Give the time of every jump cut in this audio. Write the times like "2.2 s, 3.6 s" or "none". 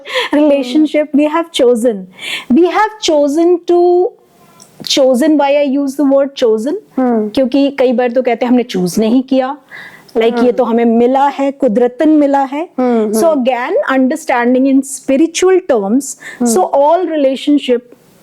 none